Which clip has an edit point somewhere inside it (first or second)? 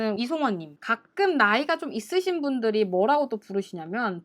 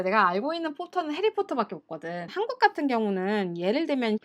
second